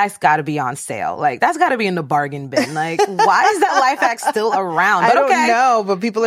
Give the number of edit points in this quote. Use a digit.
0